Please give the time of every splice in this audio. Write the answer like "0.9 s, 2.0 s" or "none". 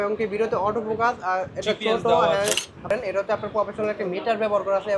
2.9 s